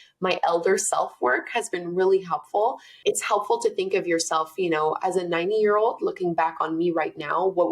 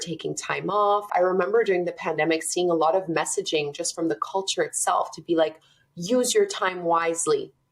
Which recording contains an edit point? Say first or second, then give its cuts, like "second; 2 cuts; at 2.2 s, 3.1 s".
second; 1 cut; at 1.1 s